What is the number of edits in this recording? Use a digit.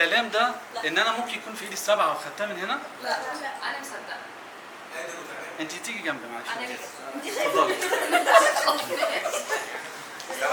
0